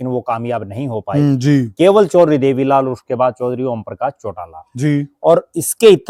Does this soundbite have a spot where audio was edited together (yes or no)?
no